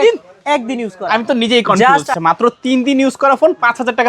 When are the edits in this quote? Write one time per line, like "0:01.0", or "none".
0:02.1